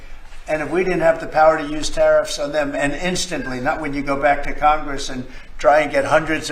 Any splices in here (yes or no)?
no